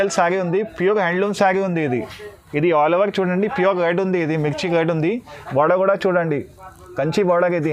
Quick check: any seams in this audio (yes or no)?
no